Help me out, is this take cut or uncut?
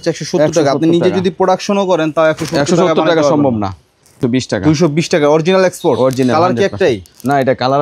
cut